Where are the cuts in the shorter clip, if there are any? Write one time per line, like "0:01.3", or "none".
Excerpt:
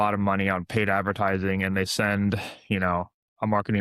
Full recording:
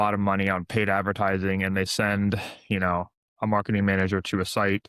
none